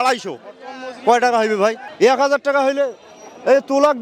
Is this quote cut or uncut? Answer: uncut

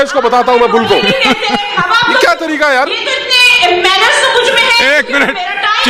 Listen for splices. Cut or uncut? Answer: uncut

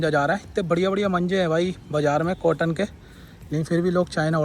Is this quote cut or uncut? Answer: uncut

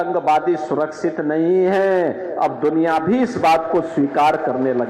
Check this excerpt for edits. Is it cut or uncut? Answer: uncut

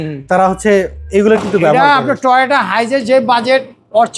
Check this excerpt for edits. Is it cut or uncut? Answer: uncut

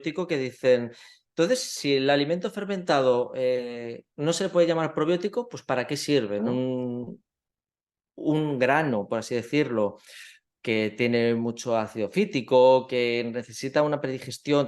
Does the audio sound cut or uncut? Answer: cut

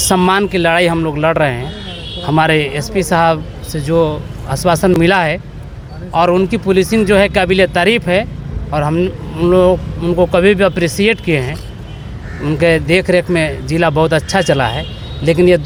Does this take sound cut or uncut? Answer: uncut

